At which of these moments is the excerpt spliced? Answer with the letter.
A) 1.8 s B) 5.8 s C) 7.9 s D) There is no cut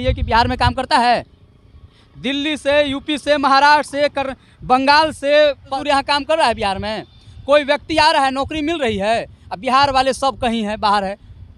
B